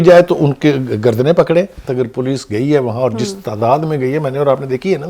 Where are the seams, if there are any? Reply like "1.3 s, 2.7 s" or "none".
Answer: 1.8 s